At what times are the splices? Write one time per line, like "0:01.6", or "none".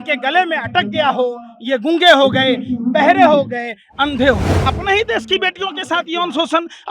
0:04.5